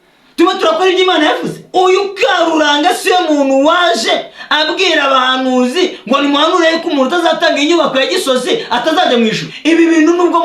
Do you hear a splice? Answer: yes; 2 cuts; at 1.6 s, 9.5 s

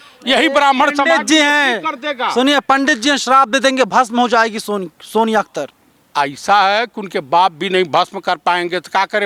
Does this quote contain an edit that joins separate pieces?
no; 0 cuts

